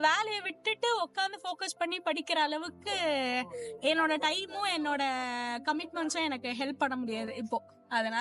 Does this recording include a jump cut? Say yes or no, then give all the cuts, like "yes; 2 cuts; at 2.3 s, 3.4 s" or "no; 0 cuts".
no; 0 cuts